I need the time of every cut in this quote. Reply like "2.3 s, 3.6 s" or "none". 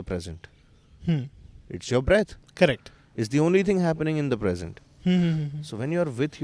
none

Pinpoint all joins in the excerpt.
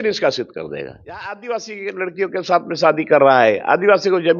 1.3 s

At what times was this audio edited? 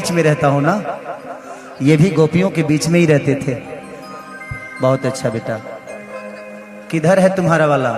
none

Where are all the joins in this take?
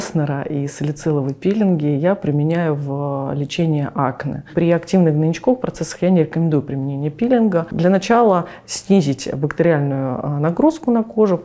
4.5 s, 7.7 s

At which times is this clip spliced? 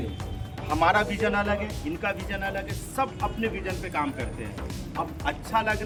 none

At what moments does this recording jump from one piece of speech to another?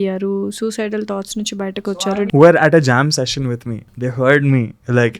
1.9 s, 3.9 s

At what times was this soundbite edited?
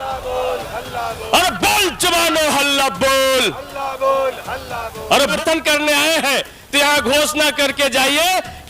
5.3 s

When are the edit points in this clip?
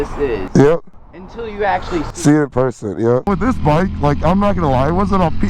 3.3 s

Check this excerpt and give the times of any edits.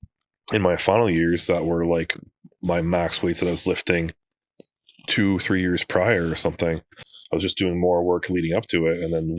none

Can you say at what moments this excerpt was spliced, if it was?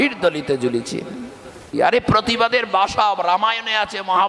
1.7 s

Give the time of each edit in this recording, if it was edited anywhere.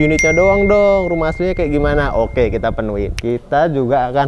3.2 s

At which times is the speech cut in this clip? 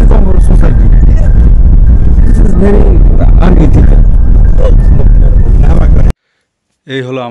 6.2 s

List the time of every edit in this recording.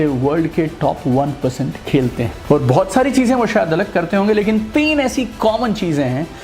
2.4 s

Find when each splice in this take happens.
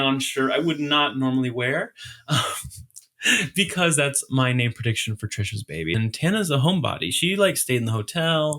6.0 s

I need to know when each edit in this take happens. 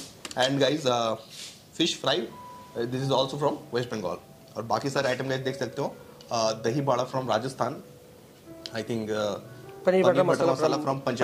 none

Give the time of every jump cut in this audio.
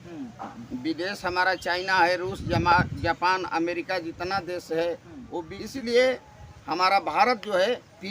5.6 s

